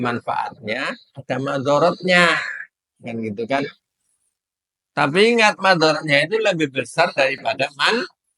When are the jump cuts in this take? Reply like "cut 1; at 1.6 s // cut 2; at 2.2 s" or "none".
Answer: none